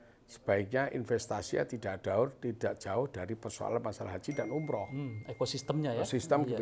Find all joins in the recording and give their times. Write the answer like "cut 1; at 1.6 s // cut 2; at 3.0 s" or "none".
none

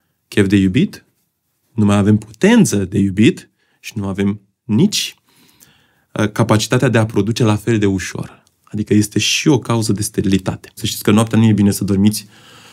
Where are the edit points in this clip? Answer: cut 1; at 10.9 s

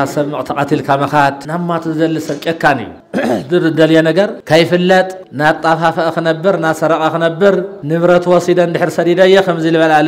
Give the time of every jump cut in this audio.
cut 1; at 1.4 s // cut 2; at 3.0 s // cut 3; at 4.4 s // cut 4; at 5.2 s // cut 5; at 7.8 s

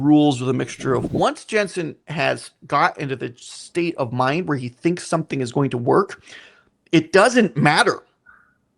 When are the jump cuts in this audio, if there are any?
cut 1; at 1.1 s

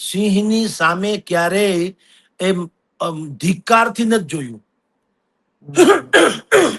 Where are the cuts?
none

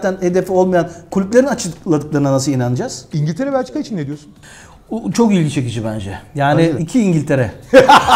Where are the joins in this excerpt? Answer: cut 1; at 3.1 s // cut 2; at 6.8 s

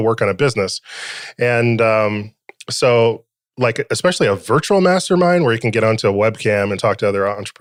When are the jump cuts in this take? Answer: none

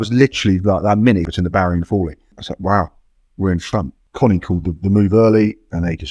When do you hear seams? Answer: cut 1; at 1.3 s // cut 2; at 2.5 s // cut 3; at 4.0 s

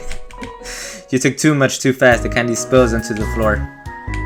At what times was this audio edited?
none

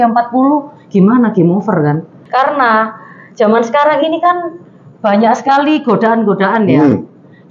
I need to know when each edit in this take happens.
cut 1; at 2.1 s

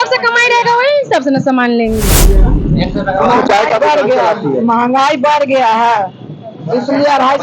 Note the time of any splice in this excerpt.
cut 1; at 2.3 s

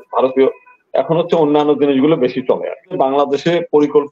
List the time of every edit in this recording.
cut 1; at 3.0 s

